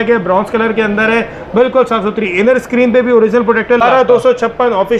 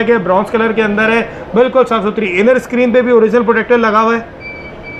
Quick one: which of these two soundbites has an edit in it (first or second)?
first